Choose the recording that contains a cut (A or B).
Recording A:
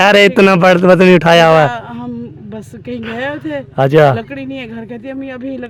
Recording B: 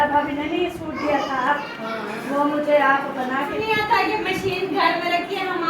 B